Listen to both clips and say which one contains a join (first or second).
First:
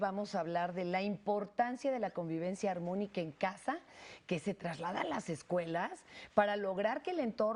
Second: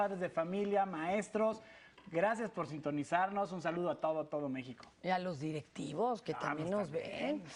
first